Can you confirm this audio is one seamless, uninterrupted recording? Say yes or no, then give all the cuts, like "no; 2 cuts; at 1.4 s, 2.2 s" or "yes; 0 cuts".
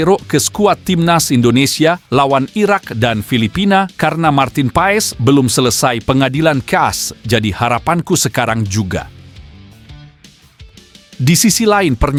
yes; 0 cuts